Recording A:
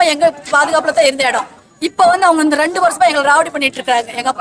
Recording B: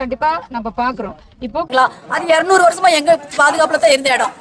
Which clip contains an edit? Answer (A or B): B